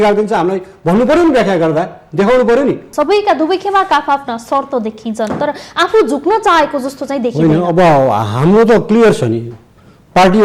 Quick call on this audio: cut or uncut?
cut